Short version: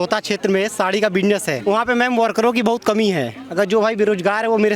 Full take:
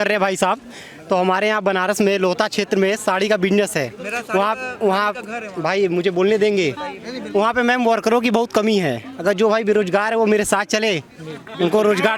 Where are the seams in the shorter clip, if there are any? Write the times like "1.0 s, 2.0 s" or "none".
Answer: 1.5 s